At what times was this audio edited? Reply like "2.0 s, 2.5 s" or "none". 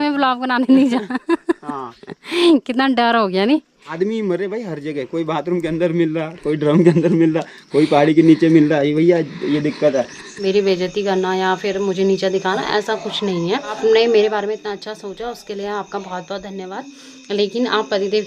3.9 s, 10.2 s, 13.8 s